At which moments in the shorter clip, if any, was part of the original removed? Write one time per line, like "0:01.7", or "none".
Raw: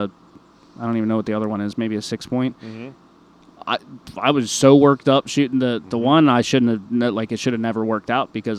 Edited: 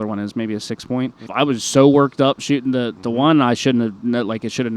0:01.2